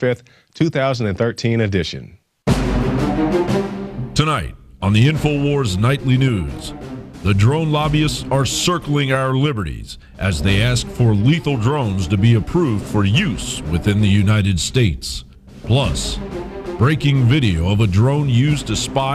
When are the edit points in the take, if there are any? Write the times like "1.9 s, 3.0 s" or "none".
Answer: 11.5 s